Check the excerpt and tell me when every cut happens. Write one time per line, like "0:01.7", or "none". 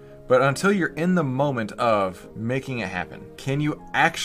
0:02.3
0:03.3